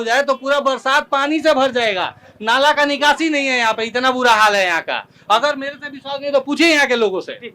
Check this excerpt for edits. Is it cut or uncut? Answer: uncut